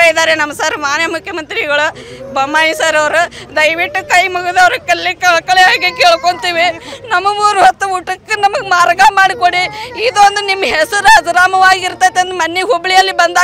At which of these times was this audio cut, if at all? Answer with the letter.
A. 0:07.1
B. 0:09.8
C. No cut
C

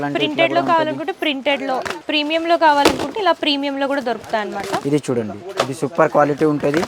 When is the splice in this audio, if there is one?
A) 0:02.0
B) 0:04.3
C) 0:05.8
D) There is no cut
A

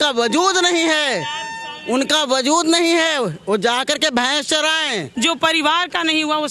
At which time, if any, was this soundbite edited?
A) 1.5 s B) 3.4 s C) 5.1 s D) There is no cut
C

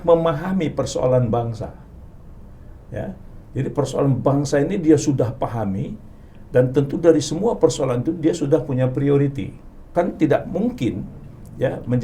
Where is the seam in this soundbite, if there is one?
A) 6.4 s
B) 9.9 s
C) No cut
B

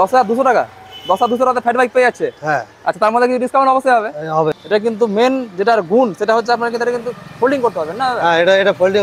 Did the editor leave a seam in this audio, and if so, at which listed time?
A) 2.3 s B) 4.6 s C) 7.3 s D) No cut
B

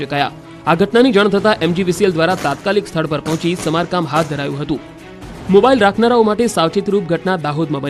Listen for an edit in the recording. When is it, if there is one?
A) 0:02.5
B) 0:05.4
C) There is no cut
C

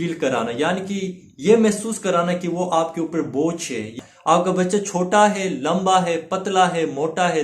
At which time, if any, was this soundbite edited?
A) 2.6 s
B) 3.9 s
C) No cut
B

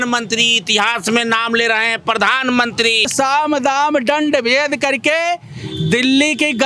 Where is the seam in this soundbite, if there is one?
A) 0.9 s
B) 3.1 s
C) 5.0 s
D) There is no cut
B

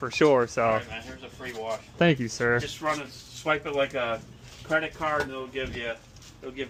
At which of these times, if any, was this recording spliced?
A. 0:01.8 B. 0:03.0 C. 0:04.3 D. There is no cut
D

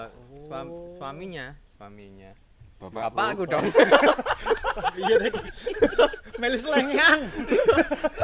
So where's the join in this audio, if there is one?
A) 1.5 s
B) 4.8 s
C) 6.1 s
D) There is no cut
D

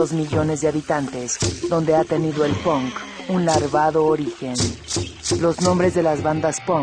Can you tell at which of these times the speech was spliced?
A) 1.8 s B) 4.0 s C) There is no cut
A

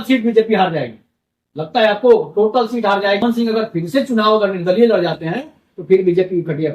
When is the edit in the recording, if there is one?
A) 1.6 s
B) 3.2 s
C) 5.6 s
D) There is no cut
B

